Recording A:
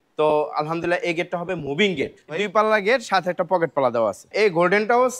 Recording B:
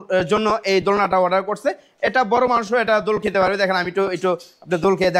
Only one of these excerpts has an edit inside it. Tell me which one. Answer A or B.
A